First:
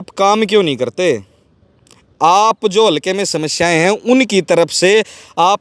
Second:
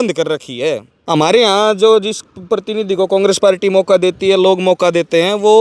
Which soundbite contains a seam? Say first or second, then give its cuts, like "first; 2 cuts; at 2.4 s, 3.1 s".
second; 1 cut; at 0.9 s